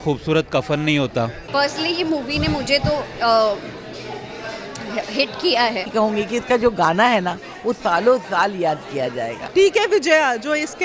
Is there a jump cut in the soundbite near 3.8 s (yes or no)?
no